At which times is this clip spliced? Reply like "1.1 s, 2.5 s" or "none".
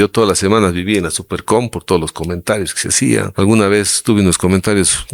3.3 s